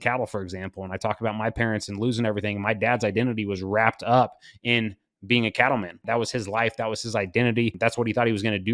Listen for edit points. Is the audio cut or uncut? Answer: cut